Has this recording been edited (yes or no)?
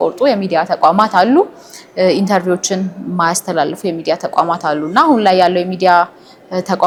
no